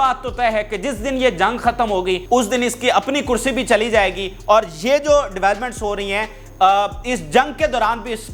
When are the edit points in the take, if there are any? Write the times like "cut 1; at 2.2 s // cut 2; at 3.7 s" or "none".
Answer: none